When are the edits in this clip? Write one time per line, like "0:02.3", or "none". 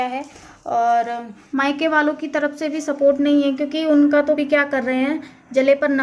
0:01.3
0:04.4